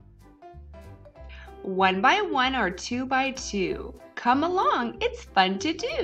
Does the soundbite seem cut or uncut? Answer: cut